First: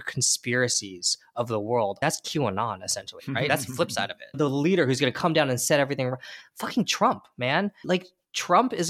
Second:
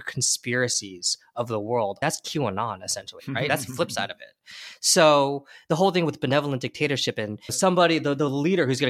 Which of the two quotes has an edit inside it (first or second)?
first